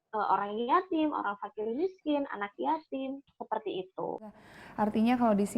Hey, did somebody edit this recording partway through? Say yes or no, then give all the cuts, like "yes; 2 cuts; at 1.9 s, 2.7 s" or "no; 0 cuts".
yes; 1 cut; at 4.4 s